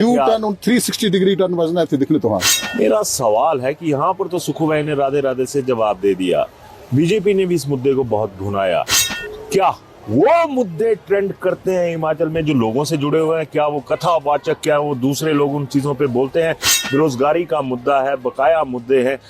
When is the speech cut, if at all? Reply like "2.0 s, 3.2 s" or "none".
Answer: 2.6 s